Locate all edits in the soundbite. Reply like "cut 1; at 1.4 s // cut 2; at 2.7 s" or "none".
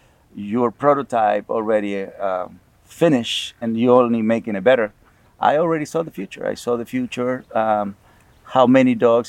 none